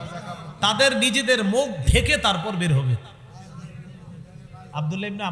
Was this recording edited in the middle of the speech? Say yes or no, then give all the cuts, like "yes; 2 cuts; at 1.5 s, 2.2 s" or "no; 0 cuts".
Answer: no; 0 cuts